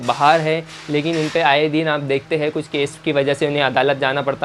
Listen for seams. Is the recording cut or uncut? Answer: uncut